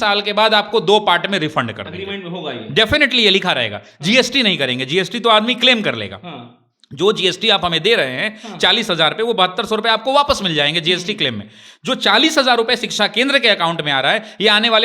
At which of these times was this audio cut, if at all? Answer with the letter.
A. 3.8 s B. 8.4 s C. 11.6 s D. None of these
D